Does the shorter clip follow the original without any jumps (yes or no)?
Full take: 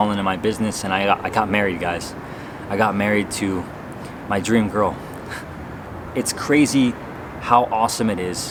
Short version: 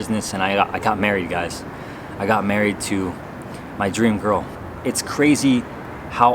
no